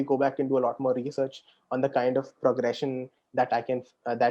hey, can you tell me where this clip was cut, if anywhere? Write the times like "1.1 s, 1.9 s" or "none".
none